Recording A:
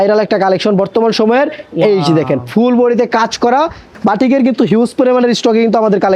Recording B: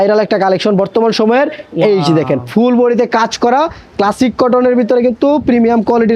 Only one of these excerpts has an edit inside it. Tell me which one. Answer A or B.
A